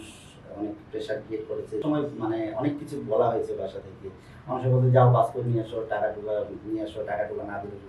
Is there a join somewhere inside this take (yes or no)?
yes